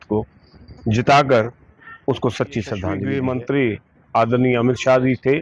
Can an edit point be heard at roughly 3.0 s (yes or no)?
yes